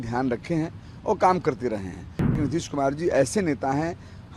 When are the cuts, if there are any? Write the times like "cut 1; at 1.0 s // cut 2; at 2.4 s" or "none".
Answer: cut 1; at 2.4 s